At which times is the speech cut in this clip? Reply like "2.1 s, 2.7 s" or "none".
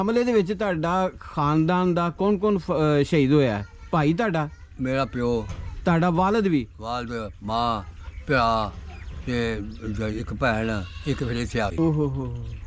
none